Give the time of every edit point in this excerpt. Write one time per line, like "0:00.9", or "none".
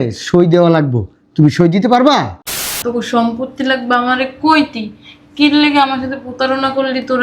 0:02.8